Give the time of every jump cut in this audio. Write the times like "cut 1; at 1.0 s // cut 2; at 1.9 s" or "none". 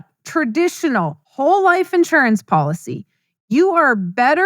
cut 1; at 1.2 s